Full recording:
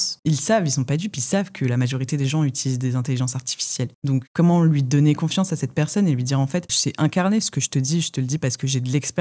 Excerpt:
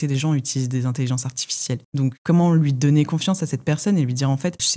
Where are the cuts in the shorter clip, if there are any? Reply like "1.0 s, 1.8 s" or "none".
none